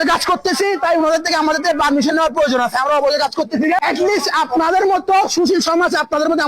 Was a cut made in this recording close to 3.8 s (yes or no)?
yes